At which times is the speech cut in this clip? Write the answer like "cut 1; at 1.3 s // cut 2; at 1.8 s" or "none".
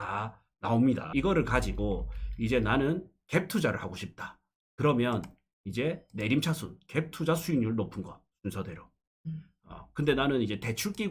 cut 1; at 1.0 s